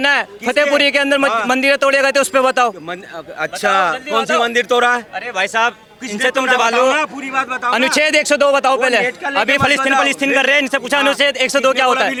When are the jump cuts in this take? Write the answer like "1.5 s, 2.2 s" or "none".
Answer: none